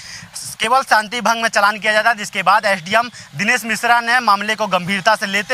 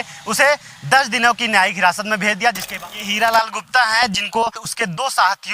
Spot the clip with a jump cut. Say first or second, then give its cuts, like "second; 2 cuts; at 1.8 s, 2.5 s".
second; 2 cuts; at 2.8 s, 4.6 s